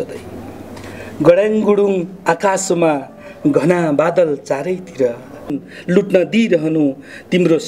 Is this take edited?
yes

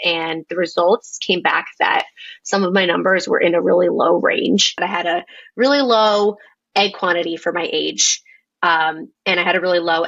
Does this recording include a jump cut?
yes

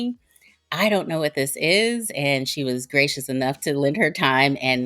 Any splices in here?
no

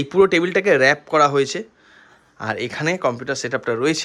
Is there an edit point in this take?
no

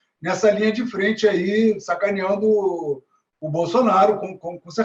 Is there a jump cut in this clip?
no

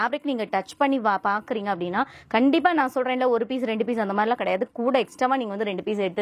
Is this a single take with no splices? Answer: yes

